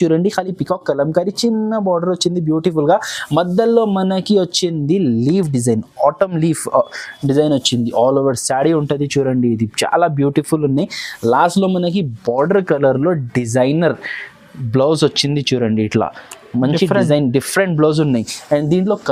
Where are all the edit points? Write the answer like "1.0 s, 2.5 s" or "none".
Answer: none